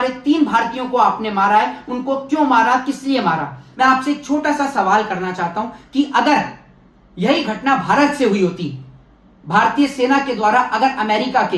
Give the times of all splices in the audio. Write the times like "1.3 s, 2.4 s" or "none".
3.6 s